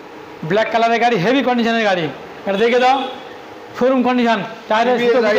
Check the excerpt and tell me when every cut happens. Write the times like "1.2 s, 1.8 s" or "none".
none